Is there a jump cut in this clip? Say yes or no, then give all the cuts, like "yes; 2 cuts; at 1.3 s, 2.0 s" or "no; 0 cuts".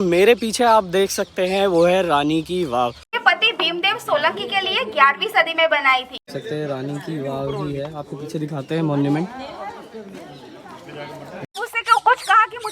yes; 3 cuts; at 3.1 s, 6.3 s, 11.5 s